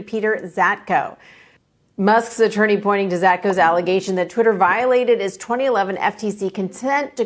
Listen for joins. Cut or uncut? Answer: uncut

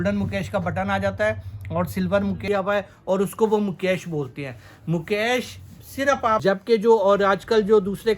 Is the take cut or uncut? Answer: cut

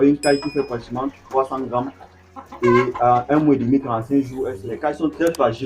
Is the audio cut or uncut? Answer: cut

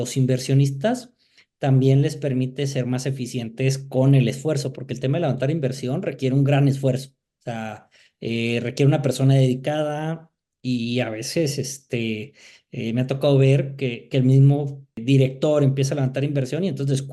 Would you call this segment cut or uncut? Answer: uncut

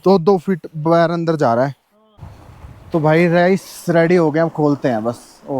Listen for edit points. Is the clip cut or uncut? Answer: cut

